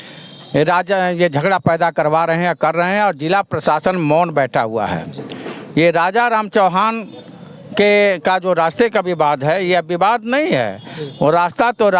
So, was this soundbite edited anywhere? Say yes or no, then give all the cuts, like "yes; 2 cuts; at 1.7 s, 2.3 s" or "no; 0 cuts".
no; 0 cuts